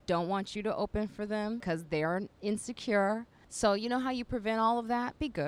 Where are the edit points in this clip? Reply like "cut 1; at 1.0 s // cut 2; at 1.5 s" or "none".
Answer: cut 1; at 1.8 s // cut 2; at 3.3 s